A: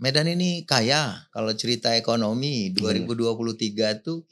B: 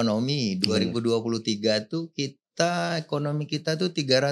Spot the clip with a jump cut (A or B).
A